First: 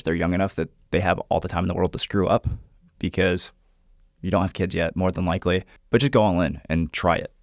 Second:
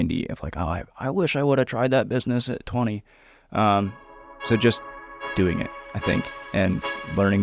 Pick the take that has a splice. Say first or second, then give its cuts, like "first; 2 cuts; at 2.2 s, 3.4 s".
first; 1 cut; at 5.7 s